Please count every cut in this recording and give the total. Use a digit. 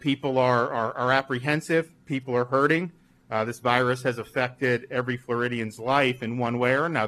0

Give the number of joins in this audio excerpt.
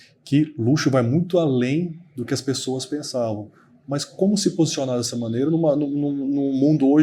0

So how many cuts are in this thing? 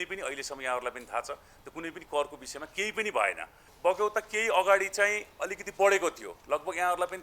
1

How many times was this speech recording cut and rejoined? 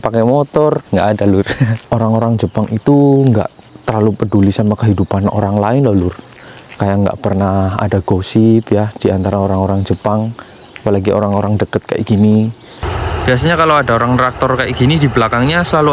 2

